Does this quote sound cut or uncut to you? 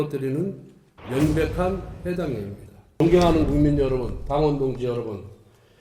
cut